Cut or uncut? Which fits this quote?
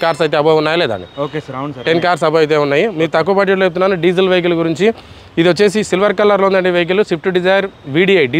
uncut